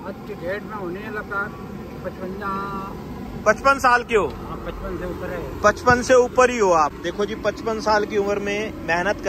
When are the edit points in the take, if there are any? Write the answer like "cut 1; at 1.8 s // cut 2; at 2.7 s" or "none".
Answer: none